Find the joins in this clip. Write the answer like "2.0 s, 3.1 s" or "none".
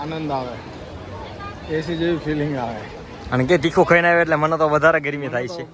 none